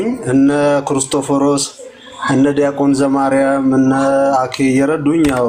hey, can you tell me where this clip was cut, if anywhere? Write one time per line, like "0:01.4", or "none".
none